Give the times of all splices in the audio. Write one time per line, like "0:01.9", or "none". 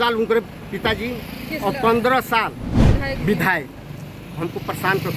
0:02.7

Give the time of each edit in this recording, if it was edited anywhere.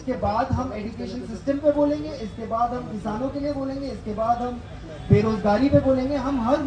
none

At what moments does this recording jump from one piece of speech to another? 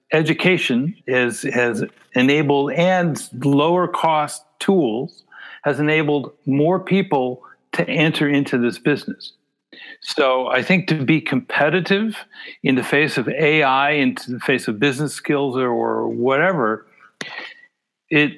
0:01.0

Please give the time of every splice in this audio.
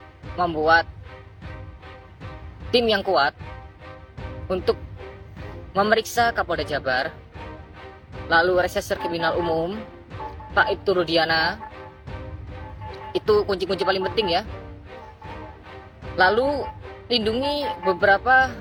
none

